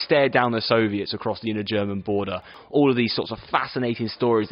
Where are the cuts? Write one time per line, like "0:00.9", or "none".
0:02.5